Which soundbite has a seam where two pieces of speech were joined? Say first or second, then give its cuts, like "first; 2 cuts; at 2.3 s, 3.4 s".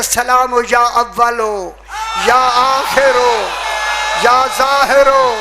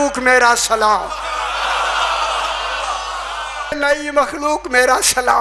second; 1 cut; at 3.7 s